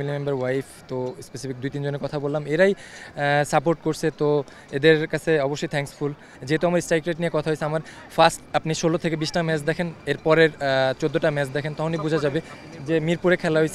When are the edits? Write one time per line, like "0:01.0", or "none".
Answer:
0:06.3